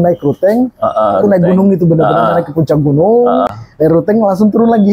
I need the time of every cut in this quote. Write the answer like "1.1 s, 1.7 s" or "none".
3.5 s